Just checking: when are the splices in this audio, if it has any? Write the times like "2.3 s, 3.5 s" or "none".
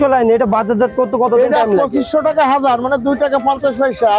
none